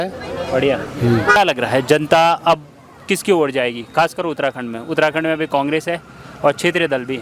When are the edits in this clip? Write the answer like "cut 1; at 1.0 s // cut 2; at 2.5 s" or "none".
cut 1; at 1.4 s

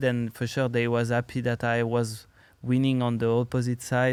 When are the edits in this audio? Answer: none

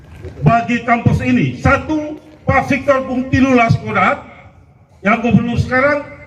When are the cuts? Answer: none

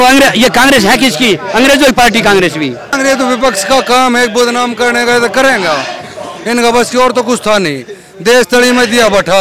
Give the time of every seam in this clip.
cut 1; at 2.9 s

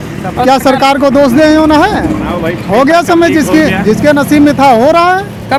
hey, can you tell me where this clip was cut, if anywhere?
none

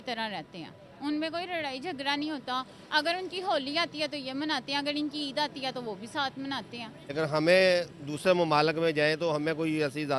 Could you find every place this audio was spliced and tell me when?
cut 1; at 7.0 s

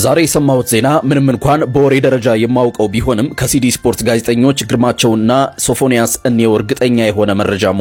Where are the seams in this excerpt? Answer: none

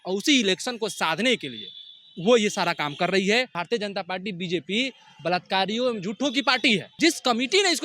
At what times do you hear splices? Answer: cut 1; at 3.6 s // cut 2; at 6.9 s

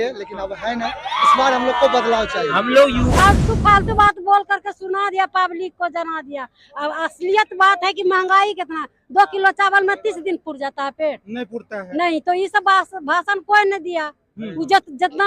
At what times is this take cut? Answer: cut 1; at 3.1 s

